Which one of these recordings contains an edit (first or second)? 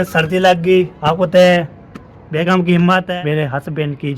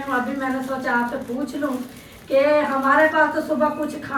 first